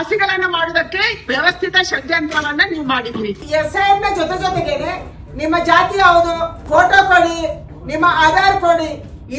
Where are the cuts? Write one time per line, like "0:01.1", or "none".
0:03.4